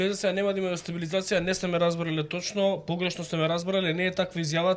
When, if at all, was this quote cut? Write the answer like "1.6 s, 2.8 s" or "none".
none

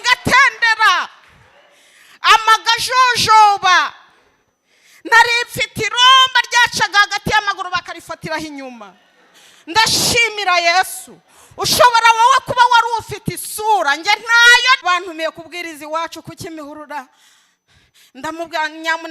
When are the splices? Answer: 14.8 s

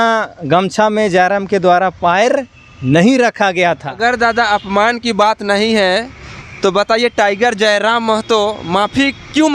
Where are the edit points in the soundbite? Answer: 3.9 s

